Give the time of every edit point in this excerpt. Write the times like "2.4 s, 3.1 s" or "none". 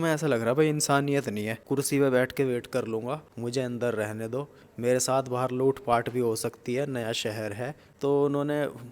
1.5 s, 3.3 s, 7.8 s